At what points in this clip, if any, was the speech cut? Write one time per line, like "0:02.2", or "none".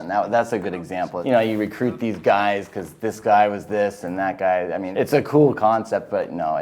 0:01.2
0:04.9